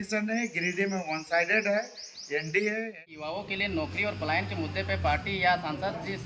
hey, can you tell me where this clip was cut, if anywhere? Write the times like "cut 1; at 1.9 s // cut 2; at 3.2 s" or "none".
cut 1; at 3.0 s